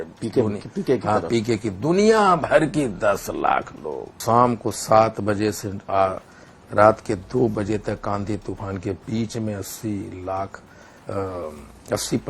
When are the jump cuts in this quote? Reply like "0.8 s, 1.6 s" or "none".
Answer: 4.2 s